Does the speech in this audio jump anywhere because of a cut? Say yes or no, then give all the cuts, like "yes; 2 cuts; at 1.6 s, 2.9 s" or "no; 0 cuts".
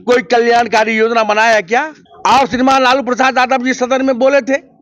yes; 1 cut; at 2.0 s